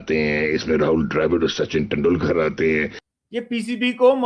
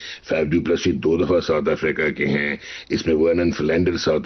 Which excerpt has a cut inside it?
first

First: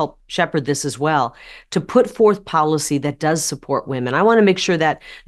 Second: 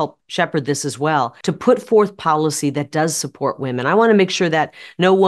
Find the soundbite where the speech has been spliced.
second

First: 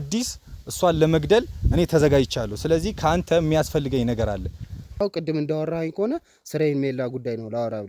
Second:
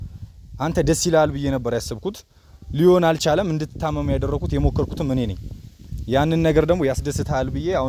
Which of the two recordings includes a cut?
first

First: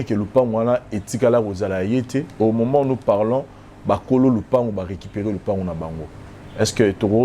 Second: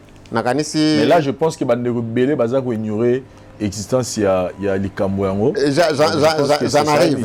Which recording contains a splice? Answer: first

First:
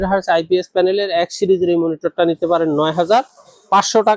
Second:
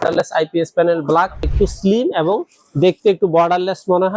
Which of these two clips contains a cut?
second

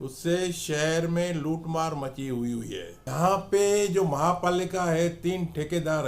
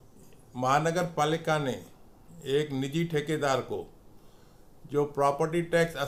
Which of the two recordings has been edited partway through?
first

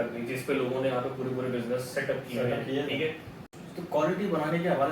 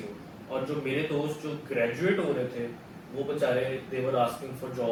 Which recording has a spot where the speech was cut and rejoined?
first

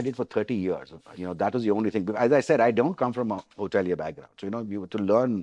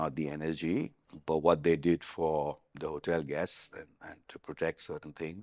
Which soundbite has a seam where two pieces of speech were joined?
second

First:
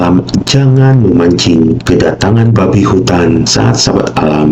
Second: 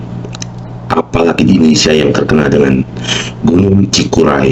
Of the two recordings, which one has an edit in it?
first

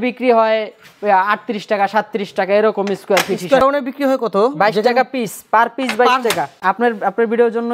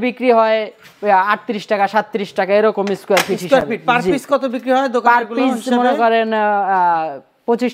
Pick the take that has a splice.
first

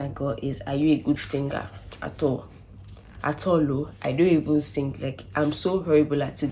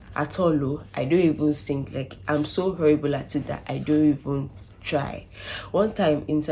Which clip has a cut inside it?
second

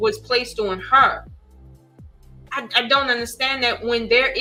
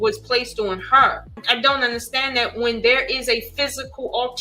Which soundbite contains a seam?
second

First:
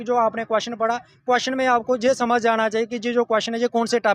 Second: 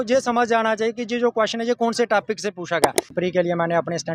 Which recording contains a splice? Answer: second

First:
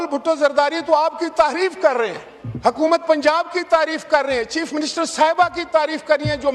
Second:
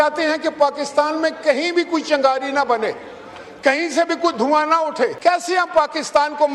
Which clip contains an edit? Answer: second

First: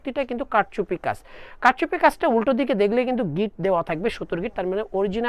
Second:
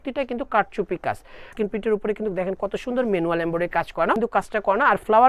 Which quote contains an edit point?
second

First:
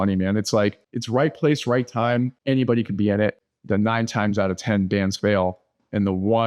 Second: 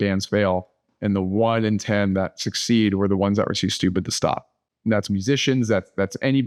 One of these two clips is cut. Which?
first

